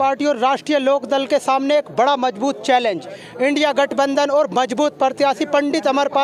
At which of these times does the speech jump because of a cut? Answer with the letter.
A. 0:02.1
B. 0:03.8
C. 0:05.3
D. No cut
D